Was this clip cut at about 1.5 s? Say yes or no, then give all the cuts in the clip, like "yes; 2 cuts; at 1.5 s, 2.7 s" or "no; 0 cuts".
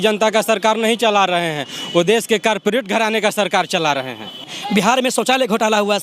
no; 1 cut; at 4.6 s